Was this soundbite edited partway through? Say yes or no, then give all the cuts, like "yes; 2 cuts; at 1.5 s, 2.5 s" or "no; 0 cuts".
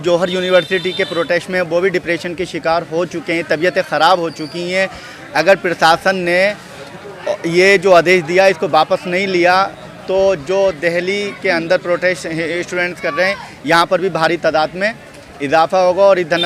no; 0 cuts